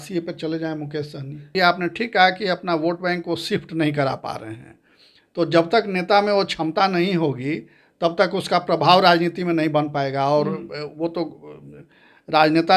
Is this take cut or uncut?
cut